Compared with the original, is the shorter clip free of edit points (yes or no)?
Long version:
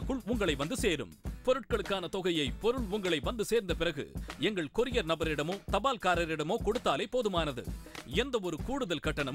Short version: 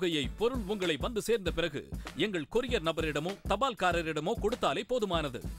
yes